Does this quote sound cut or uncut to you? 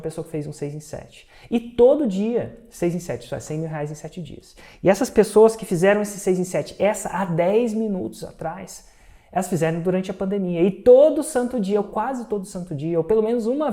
cut